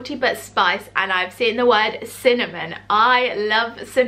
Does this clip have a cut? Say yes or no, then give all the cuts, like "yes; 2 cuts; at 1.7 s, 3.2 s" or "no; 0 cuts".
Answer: no; 0 cuts